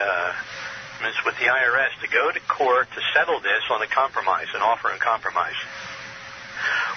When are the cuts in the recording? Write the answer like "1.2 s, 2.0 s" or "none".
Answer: none

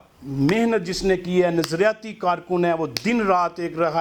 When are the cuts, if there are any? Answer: none

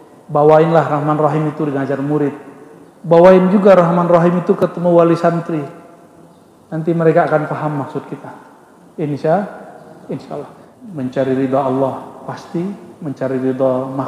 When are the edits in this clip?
10.7 s

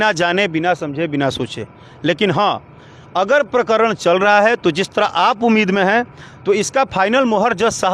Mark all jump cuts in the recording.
none

